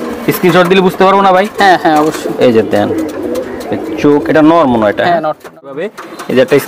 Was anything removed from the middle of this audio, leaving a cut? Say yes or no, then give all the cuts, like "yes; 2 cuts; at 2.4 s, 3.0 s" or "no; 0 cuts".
yes; 1 cut; at 5.7 s